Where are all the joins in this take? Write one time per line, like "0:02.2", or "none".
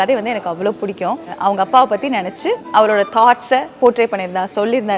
0:01.3
0:02.6